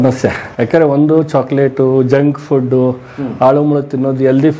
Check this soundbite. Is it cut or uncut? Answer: uncut